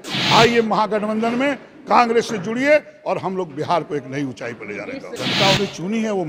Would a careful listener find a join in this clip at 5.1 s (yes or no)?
yes